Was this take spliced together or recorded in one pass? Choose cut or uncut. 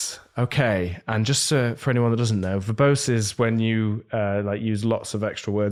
uncut